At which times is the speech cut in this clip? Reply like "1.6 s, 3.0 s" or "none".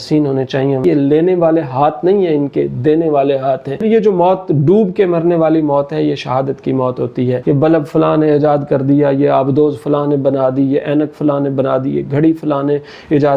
0.8 s, 3.8 s, 7.4 s